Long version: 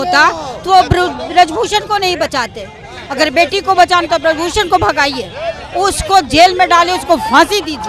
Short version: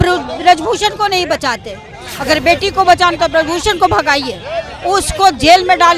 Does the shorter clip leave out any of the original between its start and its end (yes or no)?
no